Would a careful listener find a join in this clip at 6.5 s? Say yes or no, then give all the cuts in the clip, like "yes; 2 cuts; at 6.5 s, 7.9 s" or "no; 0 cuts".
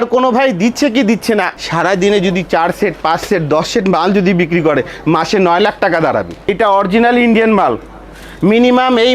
yes; 2 cuts; at 1.6 s, 6.5 s